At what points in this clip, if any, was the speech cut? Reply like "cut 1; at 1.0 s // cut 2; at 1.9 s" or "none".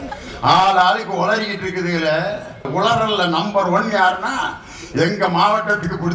cut 1; at 2.7 s